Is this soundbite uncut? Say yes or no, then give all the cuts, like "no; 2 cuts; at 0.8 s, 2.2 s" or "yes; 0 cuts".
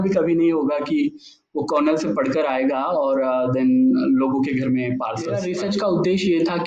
no; 1 cut; at 5.4 s